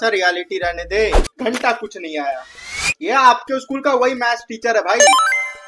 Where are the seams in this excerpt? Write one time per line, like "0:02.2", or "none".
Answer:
0:01.2